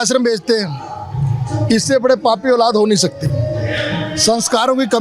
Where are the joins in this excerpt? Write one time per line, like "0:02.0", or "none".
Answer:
none